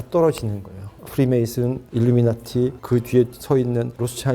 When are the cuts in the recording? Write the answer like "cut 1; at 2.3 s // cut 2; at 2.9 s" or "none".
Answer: cut 1; at 1.0 s

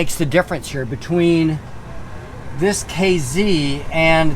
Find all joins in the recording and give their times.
none

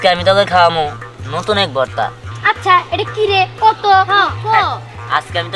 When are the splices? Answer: cut 1; at 2.2 s

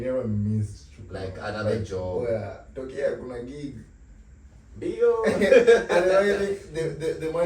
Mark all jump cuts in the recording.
none

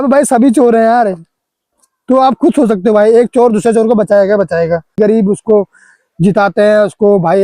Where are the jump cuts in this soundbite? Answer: cut 1; at 5.0 s

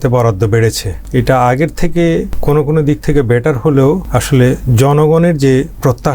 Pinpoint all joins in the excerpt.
cut 1; at 0.9 s // cut 2; at 2.3 s // cut 3; at 4.1 s

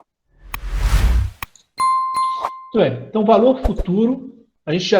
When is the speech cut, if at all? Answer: cut 1; at 2.6 s

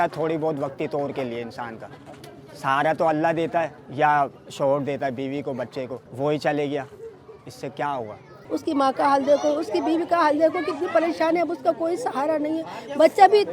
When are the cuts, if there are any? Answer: cut 1; at 3.8 s // cut 2; at 6.0 s // cut 3; at 8.4 s

